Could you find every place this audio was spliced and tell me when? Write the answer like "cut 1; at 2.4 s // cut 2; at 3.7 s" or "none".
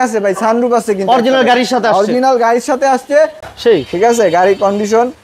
cut 1; at 3.5 s

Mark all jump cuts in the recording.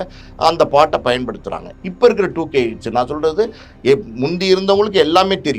cut 1; at 1.6 s

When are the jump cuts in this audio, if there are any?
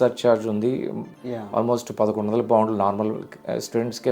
cut 1; at 1.2 s

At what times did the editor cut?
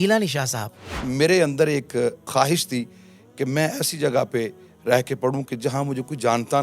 cut 1; at 1.0 s // cut 2; at 2.3 s

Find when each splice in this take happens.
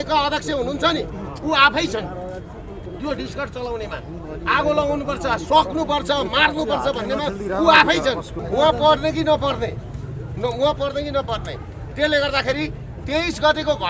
cut 1; at 8.3 s

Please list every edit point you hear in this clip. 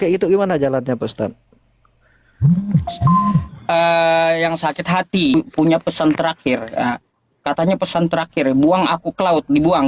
cut 1; at 5.3 s

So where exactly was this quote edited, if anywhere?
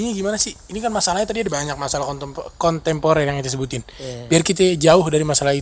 none

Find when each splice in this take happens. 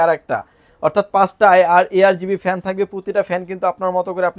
none

